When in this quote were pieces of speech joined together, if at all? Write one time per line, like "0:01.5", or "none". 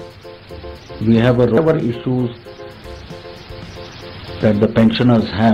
0:01.6